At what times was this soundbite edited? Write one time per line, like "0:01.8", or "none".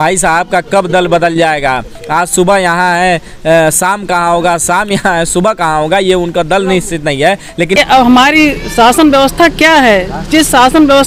0:07.7